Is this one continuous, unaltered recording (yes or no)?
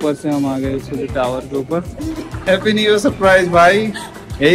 no